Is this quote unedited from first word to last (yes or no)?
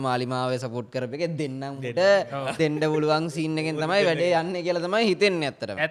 yes